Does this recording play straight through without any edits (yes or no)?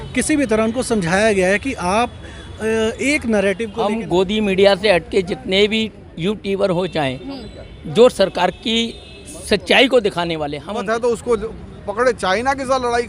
no